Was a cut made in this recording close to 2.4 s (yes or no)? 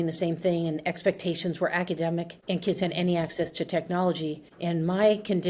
no